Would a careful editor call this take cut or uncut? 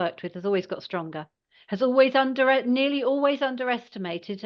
uncut